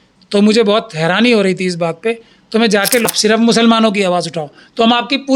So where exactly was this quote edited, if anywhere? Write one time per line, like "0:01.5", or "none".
0:03.0